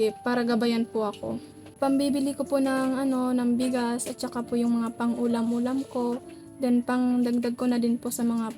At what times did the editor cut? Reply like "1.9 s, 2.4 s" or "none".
1.8 s